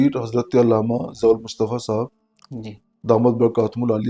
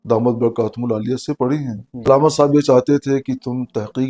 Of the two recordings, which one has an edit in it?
second; 1 cut; at 2.1 s

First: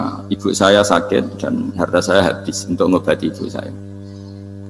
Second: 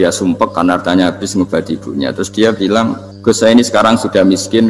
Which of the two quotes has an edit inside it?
second; 1 cut; at 3.1 s

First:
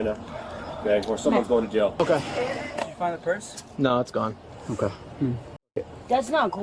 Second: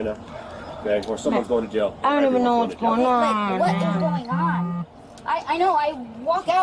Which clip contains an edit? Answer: first; 1 cut; at 2.0 s

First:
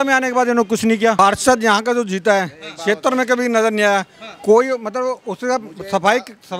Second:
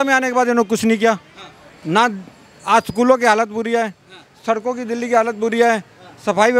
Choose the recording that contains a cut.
first; 1 cut; at 1.2 s

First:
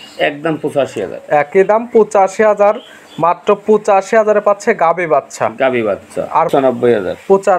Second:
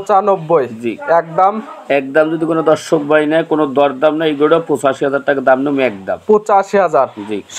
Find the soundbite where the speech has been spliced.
first; 1 cut; at 6.5 s

